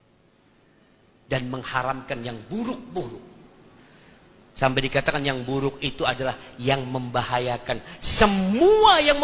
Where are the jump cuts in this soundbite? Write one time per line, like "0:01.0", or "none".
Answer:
none